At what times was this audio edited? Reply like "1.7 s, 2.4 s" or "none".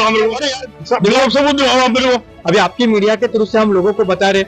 2.3 s